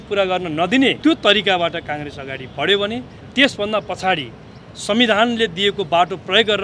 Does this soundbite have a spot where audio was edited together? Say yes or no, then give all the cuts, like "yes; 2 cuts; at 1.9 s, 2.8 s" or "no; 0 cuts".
yes; 1 cut; at 1.0 s